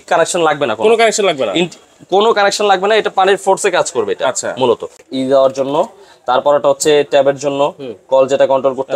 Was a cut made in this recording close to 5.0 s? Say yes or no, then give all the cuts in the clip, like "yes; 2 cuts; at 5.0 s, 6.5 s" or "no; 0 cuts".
yes; 1 cut; at 5.0 s